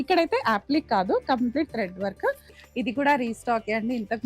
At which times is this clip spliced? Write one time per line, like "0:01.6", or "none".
0:02.6

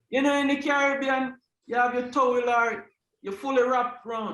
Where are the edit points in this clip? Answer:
none

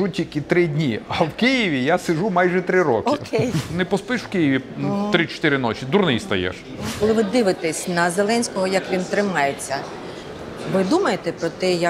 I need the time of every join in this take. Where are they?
0:03.7
0:07.0

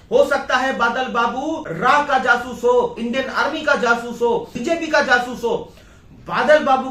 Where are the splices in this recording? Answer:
0:01.7
0:03.0
0:04.5

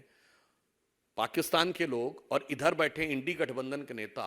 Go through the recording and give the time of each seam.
none

